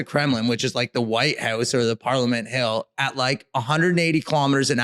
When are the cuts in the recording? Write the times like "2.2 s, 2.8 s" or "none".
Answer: none